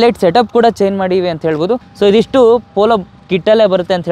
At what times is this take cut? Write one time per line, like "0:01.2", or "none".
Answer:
0:01.9